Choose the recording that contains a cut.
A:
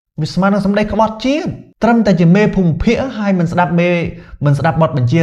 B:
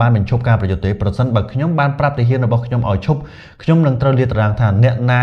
A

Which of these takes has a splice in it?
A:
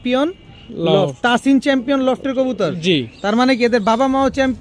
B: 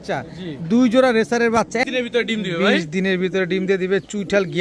B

